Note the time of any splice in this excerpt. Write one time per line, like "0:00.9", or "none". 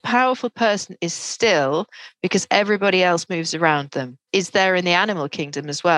0:04.2

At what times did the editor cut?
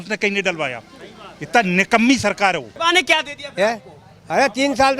0:02.7

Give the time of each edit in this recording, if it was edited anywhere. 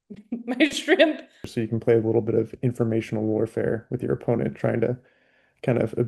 0:01.5

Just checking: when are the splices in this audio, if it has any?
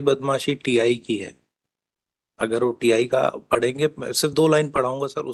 none

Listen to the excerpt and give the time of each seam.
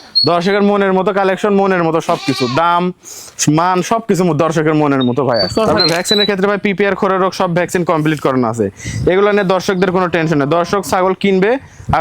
0:05.5

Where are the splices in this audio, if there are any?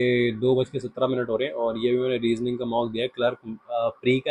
none

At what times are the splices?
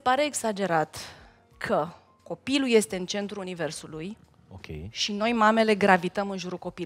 0:02.1

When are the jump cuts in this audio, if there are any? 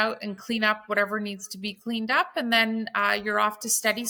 none

